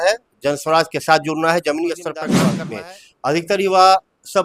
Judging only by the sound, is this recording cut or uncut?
cut